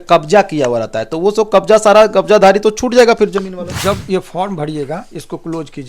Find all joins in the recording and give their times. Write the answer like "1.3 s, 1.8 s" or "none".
3.8 s